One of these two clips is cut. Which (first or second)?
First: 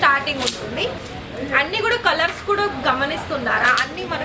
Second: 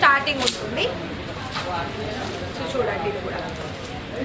first